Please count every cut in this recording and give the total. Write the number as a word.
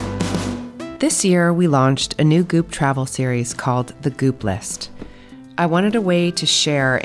one